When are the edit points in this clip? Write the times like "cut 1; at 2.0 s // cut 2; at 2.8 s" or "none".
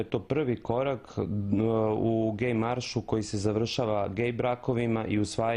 cut 1; at 3.9 s